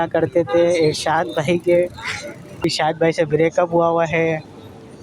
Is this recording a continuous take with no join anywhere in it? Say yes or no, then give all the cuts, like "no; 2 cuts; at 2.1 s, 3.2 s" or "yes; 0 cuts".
no; 1 cut; at 2.6 s